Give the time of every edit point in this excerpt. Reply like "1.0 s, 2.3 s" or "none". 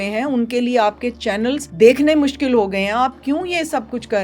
1.7 s